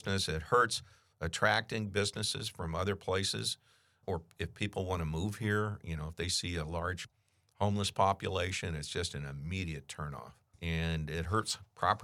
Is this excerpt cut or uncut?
cut